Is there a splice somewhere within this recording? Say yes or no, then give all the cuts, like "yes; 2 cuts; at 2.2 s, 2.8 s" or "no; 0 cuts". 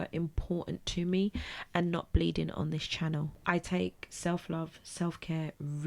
yes; 1 cut; at 3.3 s